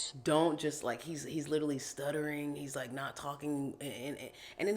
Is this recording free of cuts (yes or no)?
yes